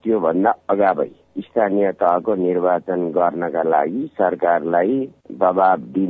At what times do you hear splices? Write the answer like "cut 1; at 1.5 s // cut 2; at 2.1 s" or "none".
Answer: cut 1; at 5.2 s